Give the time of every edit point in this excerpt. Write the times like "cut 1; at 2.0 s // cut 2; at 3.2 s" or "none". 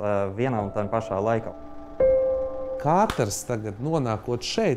cut 1; at 1.5 s // cut 2; at 2.4 s